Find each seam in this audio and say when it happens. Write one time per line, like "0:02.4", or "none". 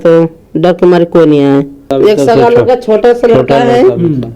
0:01.9